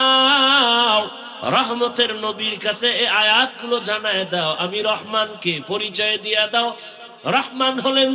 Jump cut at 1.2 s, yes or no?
yes